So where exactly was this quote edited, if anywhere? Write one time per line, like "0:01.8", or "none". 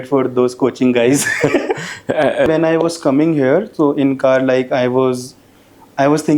0:02.5